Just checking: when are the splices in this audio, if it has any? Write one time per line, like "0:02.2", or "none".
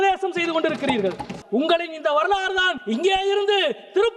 0:01.3
0:02.8